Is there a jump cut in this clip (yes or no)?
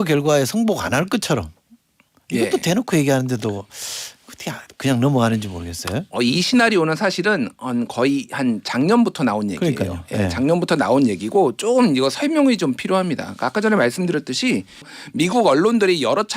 yes